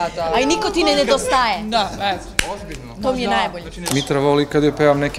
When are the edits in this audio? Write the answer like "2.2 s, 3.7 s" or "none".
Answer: 3.8 s